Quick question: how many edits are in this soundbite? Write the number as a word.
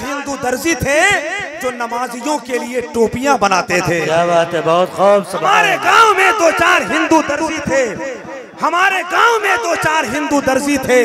zero